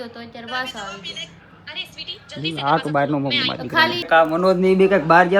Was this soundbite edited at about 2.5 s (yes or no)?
no